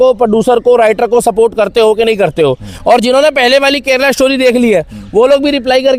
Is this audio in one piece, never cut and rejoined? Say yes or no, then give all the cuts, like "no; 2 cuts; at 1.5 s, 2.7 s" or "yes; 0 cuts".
yes; 0 cuts